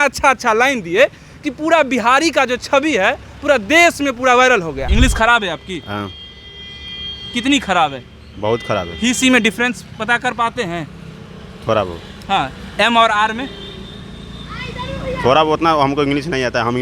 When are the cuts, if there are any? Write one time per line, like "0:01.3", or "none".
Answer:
0:04.8

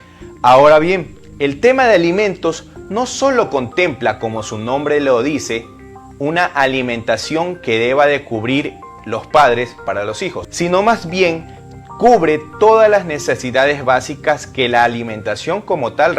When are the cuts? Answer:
0:10.4

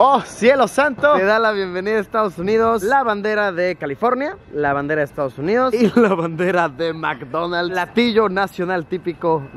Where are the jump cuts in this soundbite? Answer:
0:01.2
0:07.8

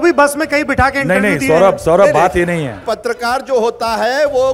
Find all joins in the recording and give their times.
0:02.8

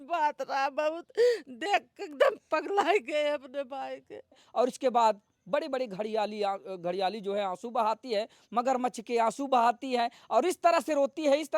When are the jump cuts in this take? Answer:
0:04.1

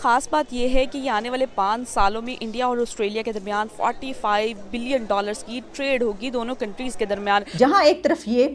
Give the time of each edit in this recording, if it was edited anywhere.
0:07.5

